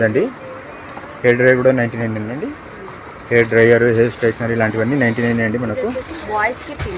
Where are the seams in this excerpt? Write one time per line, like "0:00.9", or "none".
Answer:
none